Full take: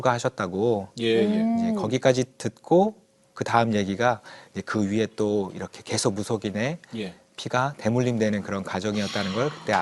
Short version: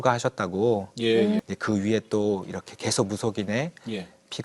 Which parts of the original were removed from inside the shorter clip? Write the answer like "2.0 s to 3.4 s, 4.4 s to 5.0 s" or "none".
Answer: 1.4 s to 4.5 s